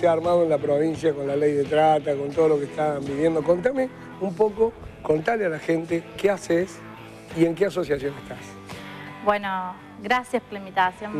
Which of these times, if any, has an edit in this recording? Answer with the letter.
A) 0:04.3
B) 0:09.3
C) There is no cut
A